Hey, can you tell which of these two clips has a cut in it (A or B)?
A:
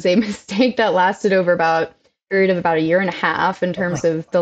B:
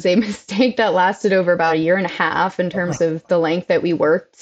B